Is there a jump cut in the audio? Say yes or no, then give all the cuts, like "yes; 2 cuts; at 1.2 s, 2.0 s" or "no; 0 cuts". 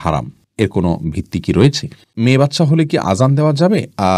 yes; 1 cut; at 2.1 s